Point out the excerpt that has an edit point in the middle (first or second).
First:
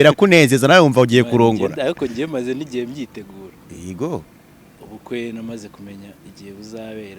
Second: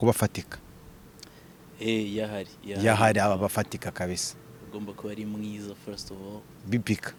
first